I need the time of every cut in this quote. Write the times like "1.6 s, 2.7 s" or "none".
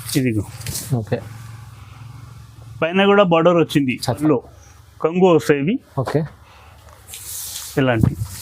4.1 s